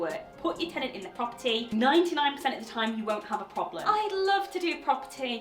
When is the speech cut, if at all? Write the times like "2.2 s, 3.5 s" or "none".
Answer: 3.8 s